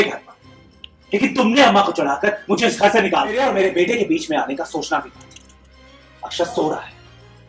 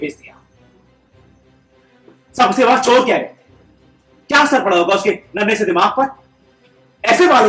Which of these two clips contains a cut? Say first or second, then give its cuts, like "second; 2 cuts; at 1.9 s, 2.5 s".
first; 1 cut; at 3.4 s